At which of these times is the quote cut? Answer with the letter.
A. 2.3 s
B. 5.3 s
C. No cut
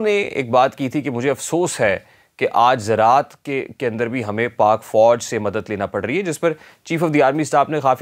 C